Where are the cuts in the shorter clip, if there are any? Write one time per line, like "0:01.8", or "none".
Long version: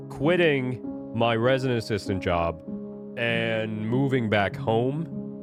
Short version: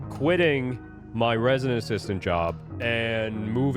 0:02.7